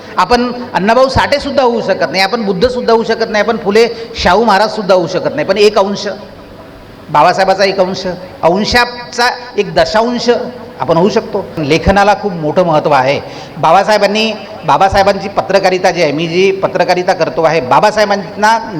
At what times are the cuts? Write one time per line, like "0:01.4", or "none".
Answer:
0:11.6